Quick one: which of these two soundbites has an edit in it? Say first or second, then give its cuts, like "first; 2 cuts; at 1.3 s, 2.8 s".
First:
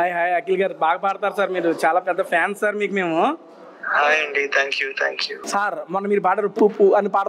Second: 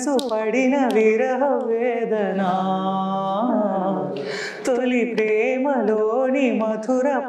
first; 2 cuts; at 5.3 s, 6.5 s